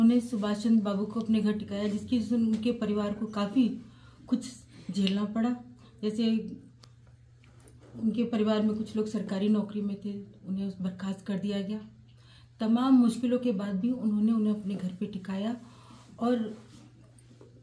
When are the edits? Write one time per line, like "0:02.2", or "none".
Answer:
none